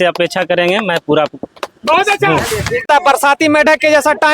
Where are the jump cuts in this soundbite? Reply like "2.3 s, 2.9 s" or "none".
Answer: 2.9 s

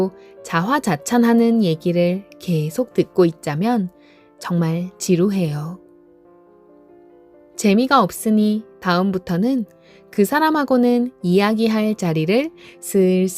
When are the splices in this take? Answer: 5.8 s, 7.6 s

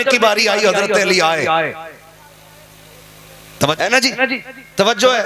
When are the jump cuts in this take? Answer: 3.8 s

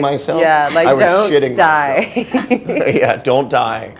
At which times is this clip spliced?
none

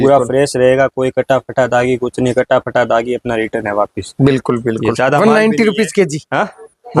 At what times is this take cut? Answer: none

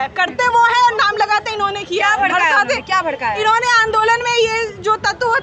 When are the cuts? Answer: none

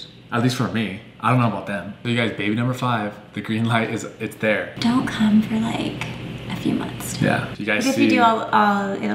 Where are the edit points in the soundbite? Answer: 2.0 s, 4.7 s

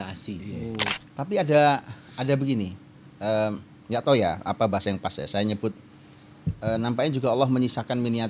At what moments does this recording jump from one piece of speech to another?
1.0 s

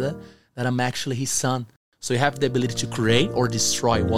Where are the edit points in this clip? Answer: 1.8 s

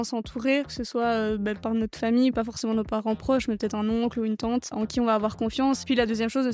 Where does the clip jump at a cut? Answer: 1.6 s, 2.3 s, 5.8 s

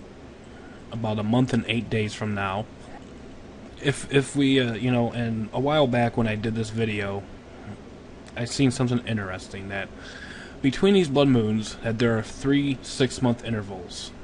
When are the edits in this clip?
3.8 s

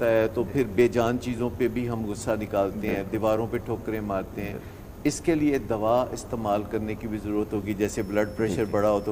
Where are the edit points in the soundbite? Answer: none

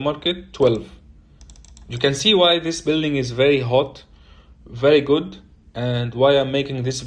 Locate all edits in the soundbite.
none

